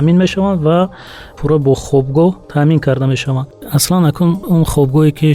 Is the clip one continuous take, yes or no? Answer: no